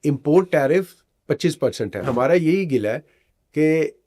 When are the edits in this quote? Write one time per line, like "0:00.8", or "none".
0:02.0